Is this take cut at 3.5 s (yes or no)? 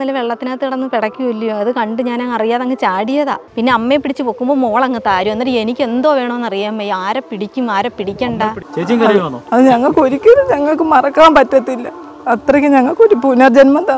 yes